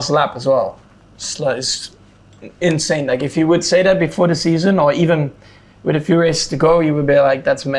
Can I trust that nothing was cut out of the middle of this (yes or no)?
yes